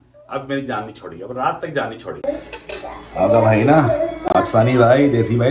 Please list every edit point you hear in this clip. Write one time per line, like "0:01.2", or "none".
0:02.2